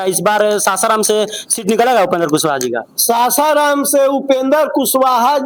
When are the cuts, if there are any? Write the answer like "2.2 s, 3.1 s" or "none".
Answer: none